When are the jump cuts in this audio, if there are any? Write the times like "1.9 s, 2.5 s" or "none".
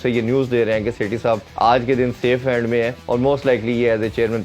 1.5 s, 3.0 s